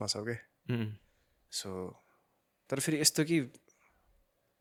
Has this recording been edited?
no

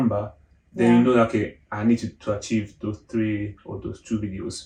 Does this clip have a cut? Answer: no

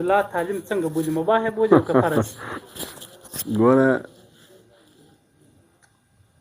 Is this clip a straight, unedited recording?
yes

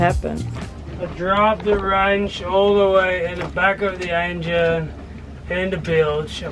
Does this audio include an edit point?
no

